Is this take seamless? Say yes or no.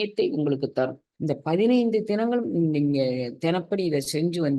no